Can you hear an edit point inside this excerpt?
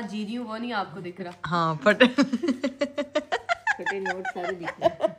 no; 0 cuts

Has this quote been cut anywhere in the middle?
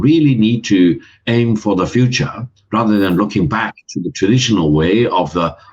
no; 0 cuts

